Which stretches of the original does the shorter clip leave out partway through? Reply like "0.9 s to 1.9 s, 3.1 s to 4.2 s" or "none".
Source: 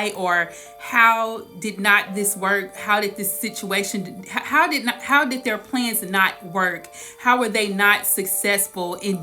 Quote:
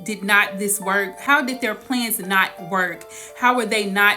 2.7 s to 5.0 s

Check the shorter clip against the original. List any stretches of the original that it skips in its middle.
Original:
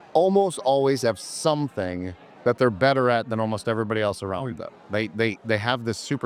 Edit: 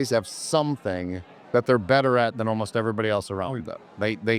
none

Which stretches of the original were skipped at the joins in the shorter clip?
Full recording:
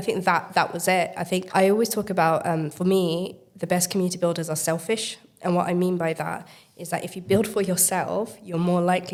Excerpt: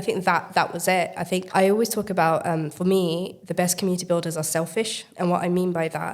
3.4 s to 3.5 s, 5.2 s to 5.3 s

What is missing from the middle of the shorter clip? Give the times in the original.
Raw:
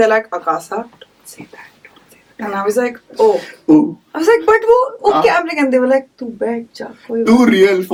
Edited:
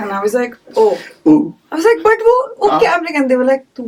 none

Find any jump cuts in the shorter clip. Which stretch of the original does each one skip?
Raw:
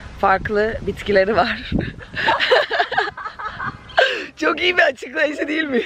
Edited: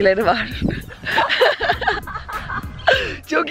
none

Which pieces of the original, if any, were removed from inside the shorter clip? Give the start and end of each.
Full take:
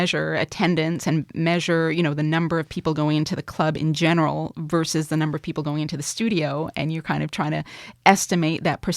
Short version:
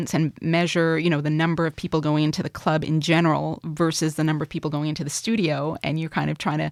none

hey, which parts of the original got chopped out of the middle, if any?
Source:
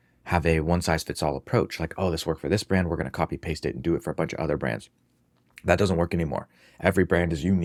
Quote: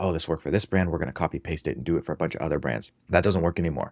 4.9 s to 5.5 s

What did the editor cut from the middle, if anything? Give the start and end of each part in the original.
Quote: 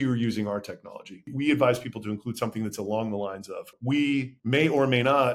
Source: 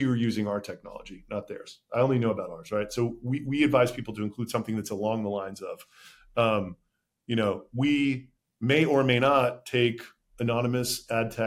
1.2 s to 3.3 s, 5.9 s to 7.7 s, 8.3 s to 8.5 s

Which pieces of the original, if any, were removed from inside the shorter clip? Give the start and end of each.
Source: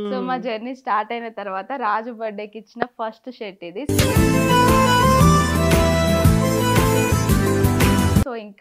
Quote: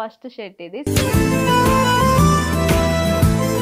none

